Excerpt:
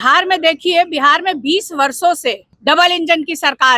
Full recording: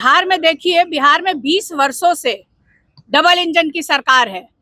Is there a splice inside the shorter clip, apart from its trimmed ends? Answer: yes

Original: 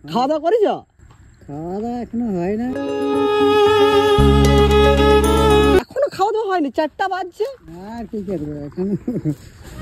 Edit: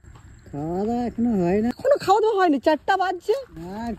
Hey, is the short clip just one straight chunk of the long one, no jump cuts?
no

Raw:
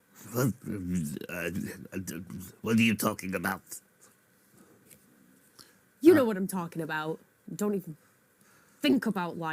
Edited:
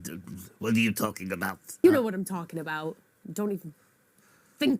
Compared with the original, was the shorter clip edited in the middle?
yes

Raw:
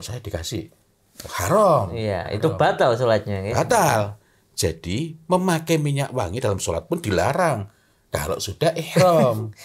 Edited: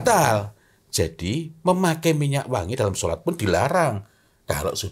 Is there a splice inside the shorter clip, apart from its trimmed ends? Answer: no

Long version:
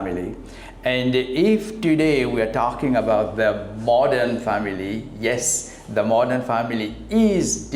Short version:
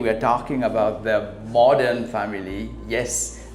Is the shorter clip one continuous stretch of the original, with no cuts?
yes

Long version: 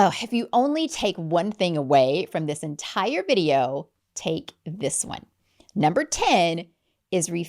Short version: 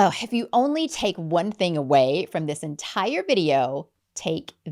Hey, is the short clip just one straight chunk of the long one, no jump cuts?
yes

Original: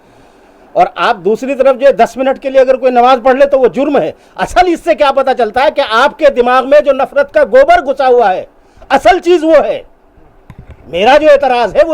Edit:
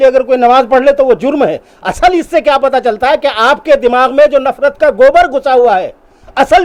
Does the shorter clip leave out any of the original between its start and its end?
no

